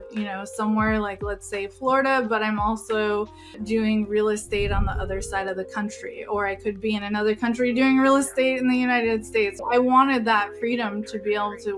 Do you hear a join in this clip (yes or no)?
yes